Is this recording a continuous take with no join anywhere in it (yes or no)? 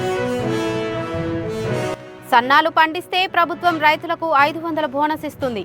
no